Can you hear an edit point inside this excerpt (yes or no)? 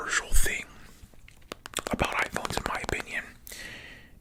no